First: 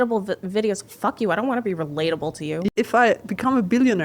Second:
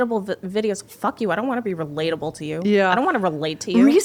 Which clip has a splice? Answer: first; 1 cut; at 2.7 s

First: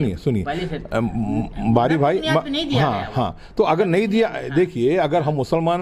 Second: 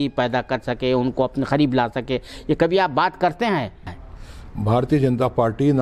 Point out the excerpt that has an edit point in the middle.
second; 1 cut; at 3.8 s

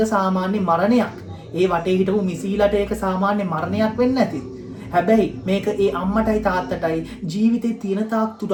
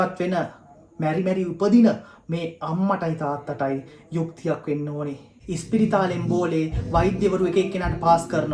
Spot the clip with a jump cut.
second; 1 cut; at 5.4 s

